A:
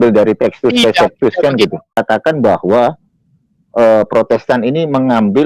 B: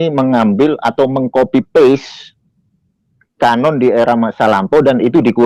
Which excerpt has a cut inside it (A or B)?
A